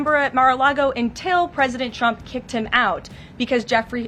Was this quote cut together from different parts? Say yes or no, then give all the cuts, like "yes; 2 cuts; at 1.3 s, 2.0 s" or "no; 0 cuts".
no; 0 cuts